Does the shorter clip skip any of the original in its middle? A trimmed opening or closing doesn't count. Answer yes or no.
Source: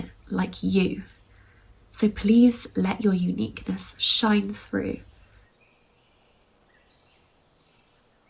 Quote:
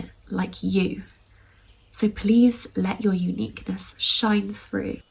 no